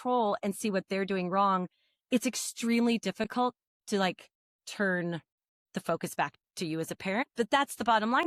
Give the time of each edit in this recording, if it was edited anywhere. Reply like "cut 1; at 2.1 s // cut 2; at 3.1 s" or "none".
none